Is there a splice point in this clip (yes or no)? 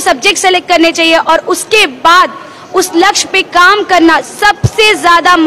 no